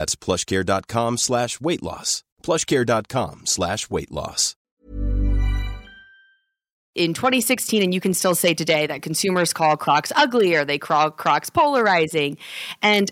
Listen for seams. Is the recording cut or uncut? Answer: cut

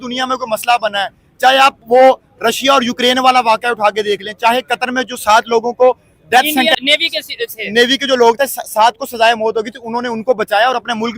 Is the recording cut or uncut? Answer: cut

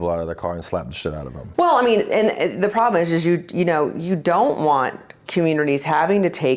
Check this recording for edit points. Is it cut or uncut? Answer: uncut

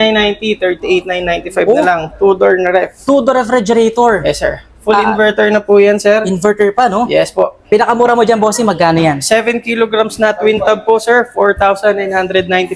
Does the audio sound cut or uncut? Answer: cut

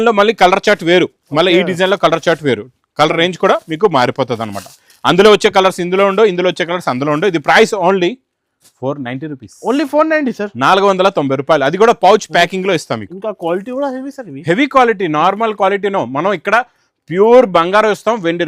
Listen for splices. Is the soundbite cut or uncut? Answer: uncut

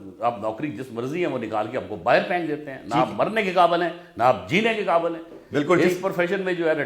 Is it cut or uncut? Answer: uncut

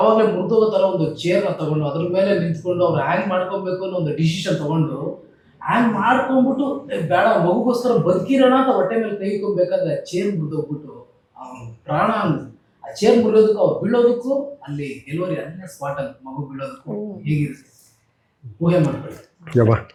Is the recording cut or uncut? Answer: uncut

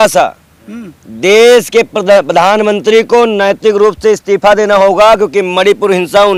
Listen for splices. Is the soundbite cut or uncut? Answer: uncut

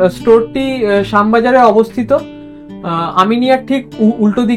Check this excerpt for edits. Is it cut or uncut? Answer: uncut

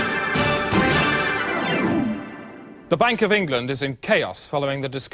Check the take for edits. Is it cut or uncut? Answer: uncut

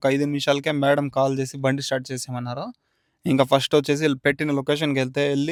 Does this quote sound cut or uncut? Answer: uncut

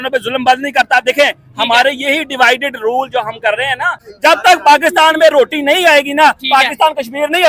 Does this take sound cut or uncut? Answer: cut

